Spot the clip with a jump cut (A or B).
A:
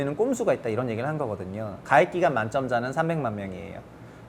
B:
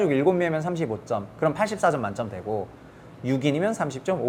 A